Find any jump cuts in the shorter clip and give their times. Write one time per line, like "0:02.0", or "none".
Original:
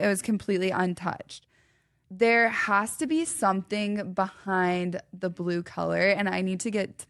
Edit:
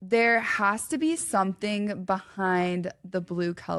none